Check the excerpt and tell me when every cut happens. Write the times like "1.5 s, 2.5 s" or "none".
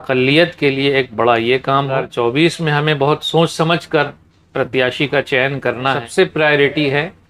2.1 s, 6.0 s